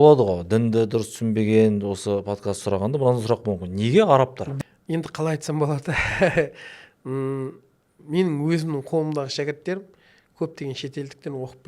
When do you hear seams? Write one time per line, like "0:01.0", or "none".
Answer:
0:04.4